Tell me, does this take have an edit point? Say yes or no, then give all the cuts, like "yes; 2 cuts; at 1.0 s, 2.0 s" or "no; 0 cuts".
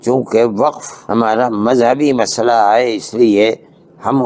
yes; 1 cut; at 0.9 s